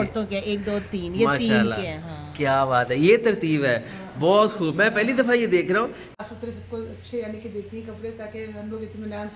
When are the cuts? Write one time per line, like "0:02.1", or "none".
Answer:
0:06.1